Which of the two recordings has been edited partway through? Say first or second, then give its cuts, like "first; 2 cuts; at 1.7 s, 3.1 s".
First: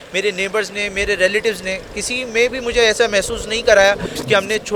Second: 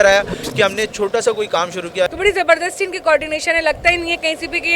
second; 1 cut; at 2.1 s